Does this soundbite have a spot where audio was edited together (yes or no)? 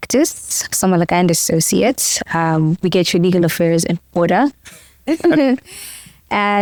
no